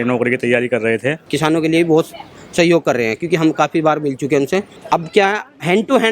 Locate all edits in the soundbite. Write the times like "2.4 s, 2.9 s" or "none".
1.2 s, 4.7 s